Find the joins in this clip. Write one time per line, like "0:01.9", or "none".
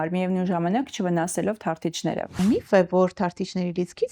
0:02.4